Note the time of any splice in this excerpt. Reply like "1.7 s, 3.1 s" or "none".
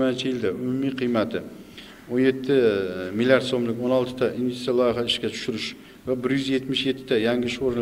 none